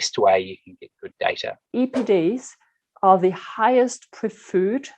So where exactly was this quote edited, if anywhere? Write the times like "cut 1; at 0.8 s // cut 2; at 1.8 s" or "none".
cut 1; at 1.6 s